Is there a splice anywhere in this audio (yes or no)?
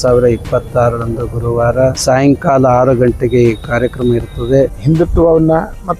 yes